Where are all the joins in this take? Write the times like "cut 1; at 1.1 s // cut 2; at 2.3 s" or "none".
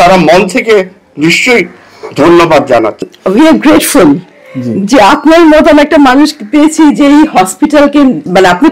cut 1; at 3.1 s